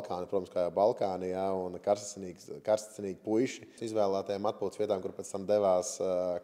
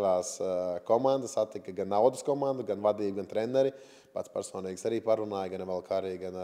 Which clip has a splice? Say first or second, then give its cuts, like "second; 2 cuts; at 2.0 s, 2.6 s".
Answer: first; 1 cut; at 3.8 s